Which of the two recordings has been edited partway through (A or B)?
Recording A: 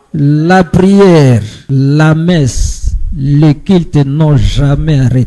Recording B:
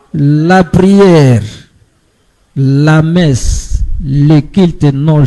A